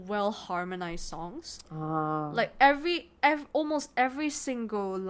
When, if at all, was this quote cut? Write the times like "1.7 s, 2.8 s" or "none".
none